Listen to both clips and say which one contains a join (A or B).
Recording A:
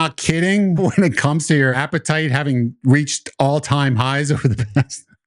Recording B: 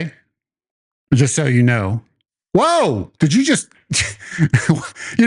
A